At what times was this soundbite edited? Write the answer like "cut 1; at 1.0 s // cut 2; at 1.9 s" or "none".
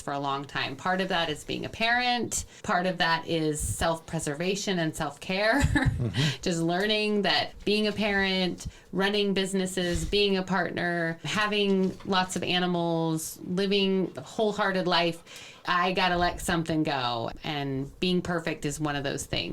none

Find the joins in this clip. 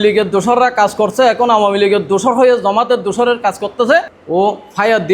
cut 1; at 4.2 s

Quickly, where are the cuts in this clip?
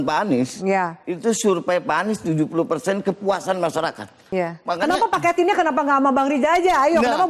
cut 1; at 4.2 s

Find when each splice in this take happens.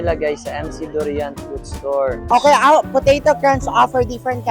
cut 1; at 2.3 s

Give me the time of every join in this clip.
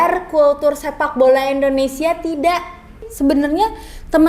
cut 1; at 3.1 s

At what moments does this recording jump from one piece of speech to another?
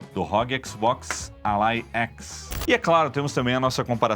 cut 1; at 2.5 s

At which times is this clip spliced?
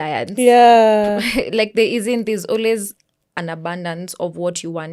none

